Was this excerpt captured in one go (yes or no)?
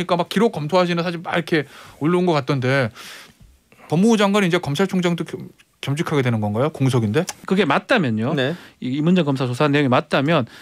no